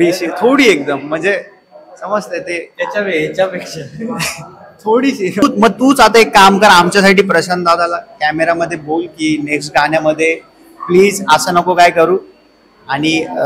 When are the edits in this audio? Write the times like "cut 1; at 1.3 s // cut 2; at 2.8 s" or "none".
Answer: cut 1; at 5.4 s

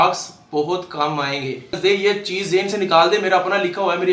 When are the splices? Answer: cut 1; at 1.7 s

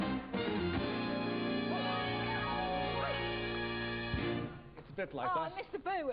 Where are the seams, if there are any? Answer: cut 1; at 3.4 s

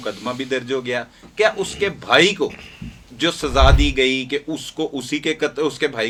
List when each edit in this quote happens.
none

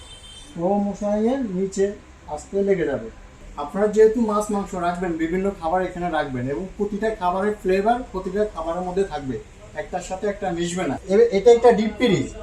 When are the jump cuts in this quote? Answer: cut 1; at 3.6 s // cut 2; at 11.0 s

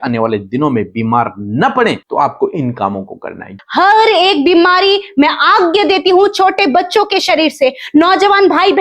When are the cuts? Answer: cut 1; at 2.0 s // cut 2; at 3.6 s

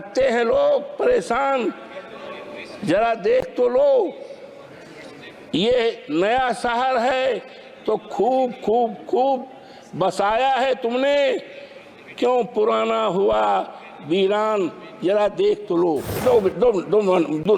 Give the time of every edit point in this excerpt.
cut 1; at 16.2 s

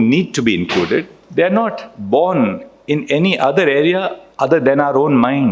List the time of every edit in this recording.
cut 1; at 1.2 s // cut 2; at 4.2 s

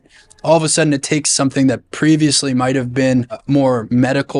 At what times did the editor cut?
cut 1; at 3.4 s

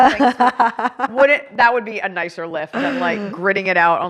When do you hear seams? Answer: cut 1; at 1.1 s

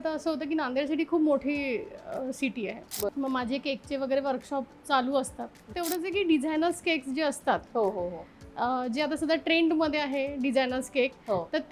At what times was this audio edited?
cut 1; at 3.1 s // cut 2; at 5.6 s

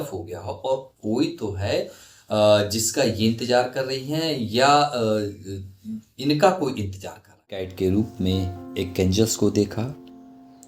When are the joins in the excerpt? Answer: cut 1; at 7.6 s

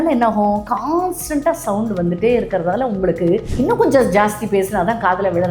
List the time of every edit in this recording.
none

